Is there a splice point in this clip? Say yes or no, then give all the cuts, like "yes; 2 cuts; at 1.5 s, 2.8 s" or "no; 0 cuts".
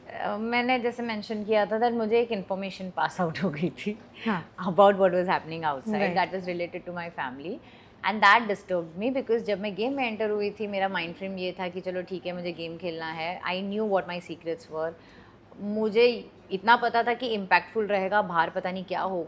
no; 0 cuts